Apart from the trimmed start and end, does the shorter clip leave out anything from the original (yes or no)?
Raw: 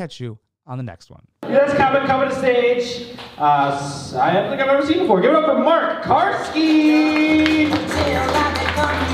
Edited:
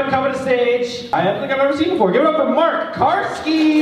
yes